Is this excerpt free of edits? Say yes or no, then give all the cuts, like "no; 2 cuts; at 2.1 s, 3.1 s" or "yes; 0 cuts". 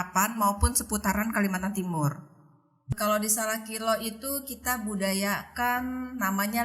no; 1 cut; at 2.9 s